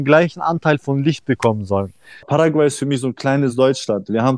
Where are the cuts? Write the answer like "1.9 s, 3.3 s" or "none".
2.2 s